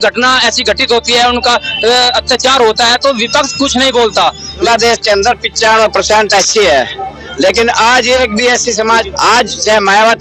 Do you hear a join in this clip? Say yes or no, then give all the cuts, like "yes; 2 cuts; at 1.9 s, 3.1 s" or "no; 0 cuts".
yes; 2 cuts; at 4.6 s, 9.1 s